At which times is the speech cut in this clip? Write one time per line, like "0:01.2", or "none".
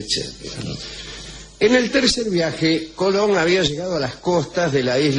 0:01.3

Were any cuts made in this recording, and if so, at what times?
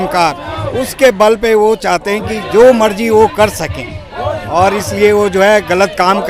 none

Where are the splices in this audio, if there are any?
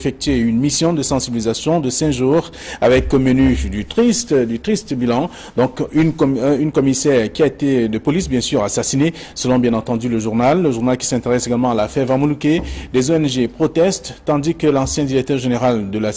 none

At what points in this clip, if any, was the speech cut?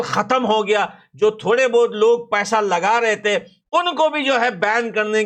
none

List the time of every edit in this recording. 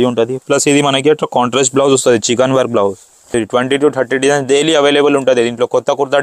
0:03.3

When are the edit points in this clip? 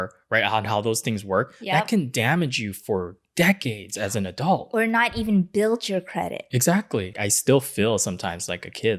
0:07.1

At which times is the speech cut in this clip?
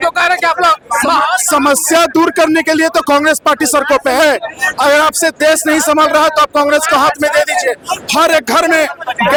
none

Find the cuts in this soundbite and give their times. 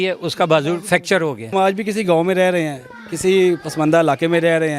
0:01.5

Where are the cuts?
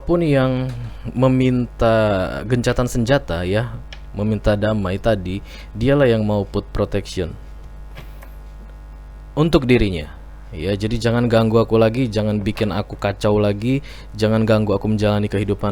none

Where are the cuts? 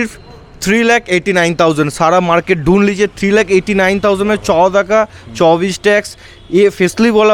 none

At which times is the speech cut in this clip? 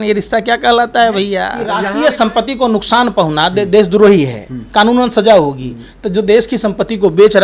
0:01.6

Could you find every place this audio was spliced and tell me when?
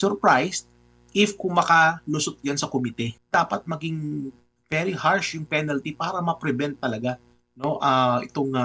0:03.2

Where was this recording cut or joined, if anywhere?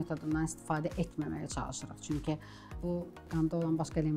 0:02.8

